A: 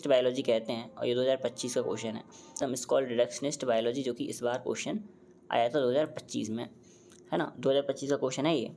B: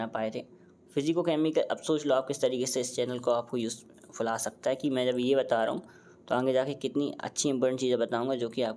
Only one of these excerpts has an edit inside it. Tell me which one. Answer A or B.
A